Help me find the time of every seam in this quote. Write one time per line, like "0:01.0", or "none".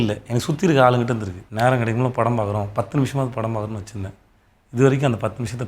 0:01.4

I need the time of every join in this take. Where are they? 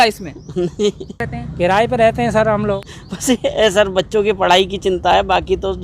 0:01.4
0:02.9

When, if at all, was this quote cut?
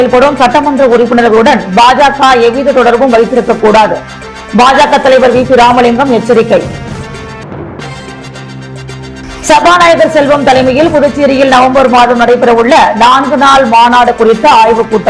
none

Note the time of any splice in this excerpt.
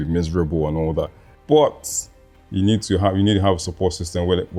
none

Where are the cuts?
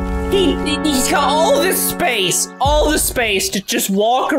none

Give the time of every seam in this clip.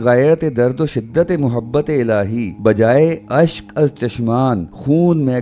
none

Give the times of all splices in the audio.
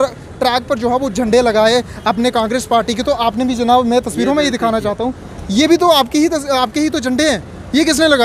none

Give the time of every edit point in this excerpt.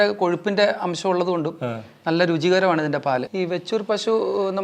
0:03.3

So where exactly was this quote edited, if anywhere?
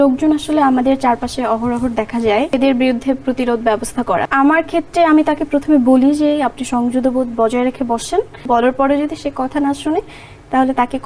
0:02.6
0:04.3
0:08.4

